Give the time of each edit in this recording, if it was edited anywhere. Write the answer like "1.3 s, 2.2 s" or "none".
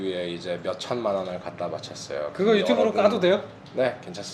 none